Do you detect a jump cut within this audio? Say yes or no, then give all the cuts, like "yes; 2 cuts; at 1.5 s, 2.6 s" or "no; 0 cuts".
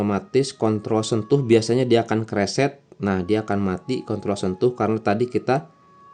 no; 0 cuts